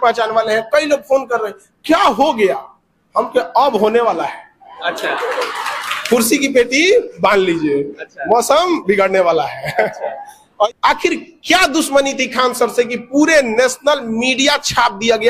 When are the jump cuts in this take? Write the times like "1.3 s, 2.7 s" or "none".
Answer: 10.7 s